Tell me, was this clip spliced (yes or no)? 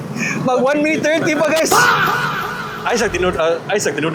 no